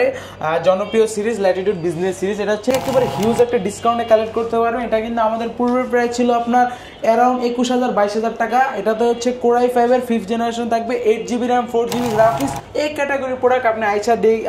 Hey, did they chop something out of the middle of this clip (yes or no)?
yes